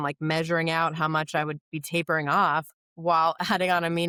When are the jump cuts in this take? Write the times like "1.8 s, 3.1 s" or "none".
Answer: none